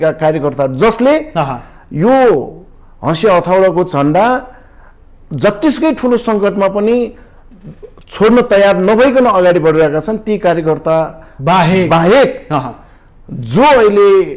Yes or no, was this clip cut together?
no